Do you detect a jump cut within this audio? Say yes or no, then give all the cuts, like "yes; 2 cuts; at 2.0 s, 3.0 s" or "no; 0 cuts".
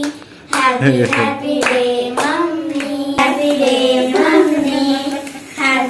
yes; 1 cut; at 3.2 s